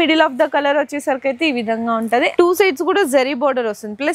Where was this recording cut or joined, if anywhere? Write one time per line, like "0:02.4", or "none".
0:02.3